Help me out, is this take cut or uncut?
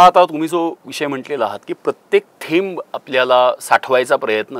uncut